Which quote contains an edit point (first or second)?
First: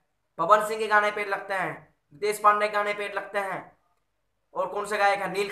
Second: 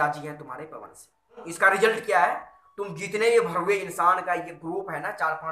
second